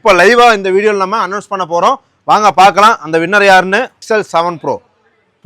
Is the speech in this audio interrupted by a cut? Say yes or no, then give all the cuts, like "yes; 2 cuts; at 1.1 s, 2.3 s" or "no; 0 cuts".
yes; 1 cut; at 4.0 s